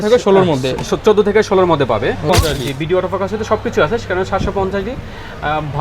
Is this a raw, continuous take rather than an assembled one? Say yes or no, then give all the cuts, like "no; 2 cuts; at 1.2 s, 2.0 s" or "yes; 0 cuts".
no; 1 cut; at 2.3 s